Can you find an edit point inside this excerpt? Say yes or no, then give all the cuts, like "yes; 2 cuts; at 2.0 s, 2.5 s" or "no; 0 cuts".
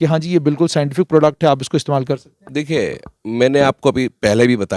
no; 0 cuts